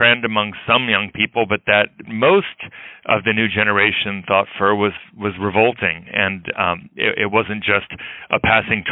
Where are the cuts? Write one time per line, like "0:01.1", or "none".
0:02.1